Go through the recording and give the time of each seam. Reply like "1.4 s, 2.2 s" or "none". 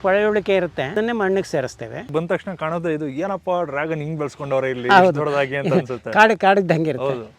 0.9 s, 2.1 s